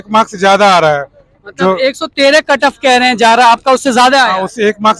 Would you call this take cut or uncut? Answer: uncut